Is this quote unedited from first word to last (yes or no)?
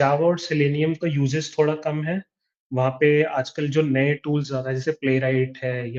yes